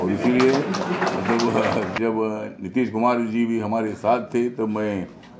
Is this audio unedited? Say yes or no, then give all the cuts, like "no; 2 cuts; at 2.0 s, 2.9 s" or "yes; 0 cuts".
no; 1 cut; at 1.9 s